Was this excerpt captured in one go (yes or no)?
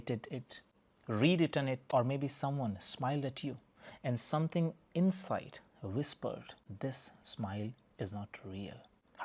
no